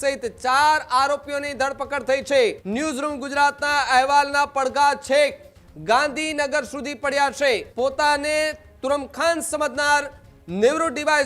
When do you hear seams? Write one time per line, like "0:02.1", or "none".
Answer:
0:02.6
0:07.7